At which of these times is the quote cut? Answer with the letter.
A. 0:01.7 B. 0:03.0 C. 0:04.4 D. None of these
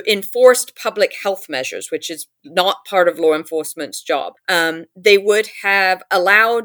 C